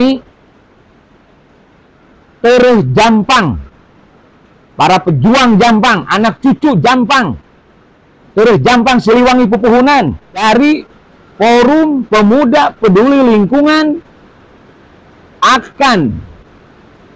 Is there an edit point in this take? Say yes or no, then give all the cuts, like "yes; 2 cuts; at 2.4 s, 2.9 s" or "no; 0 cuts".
yes; 1 cut; at 10.4 s